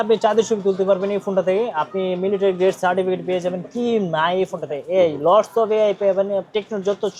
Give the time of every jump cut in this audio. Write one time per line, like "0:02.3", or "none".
none